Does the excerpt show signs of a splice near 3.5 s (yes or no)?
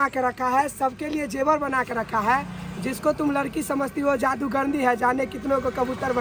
no